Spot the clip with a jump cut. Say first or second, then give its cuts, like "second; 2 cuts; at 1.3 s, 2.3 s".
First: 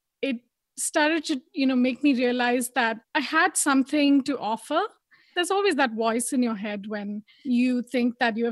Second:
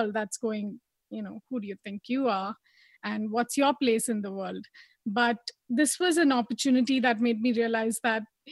first; 3 cuts; at 3.0 s, 5.3 s, 7.4 s